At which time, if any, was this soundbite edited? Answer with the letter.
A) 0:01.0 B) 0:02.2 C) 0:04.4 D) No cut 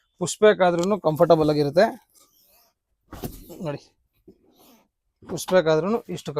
D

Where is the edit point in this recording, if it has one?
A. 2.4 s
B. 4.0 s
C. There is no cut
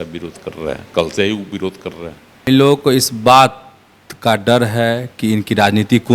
A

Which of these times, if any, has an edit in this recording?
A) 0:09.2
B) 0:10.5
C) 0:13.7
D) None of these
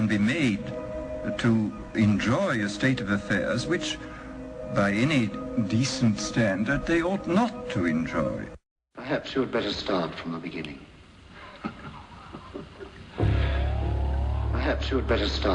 C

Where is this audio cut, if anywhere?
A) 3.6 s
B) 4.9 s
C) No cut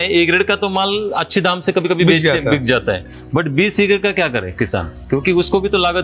C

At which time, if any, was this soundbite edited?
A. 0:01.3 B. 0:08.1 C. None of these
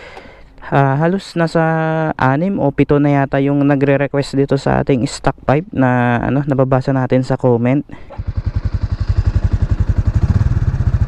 B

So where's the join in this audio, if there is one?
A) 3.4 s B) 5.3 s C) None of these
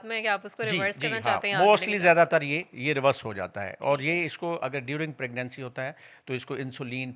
C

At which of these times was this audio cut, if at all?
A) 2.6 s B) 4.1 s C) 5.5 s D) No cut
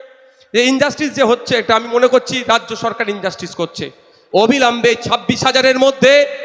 B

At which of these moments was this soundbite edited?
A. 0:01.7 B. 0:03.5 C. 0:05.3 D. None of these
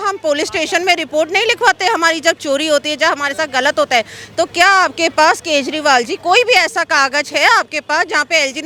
D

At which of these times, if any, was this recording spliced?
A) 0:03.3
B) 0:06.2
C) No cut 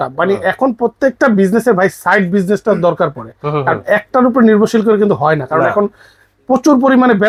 C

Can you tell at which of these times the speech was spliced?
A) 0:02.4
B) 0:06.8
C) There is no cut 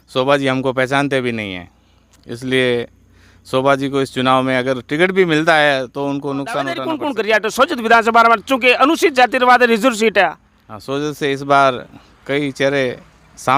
B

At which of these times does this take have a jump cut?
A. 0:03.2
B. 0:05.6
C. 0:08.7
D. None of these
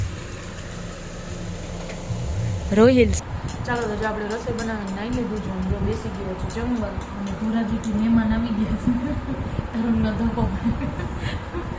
A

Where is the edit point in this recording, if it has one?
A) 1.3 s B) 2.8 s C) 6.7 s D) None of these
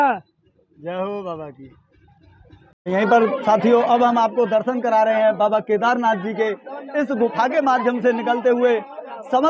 B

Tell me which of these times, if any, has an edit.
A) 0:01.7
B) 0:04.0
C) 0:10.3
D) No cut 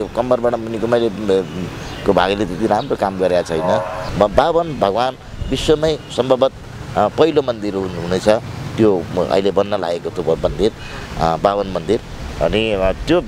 B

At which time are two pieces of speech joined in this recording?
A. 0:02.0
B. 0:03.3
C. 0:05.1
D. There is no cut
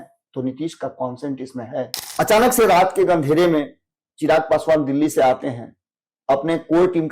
A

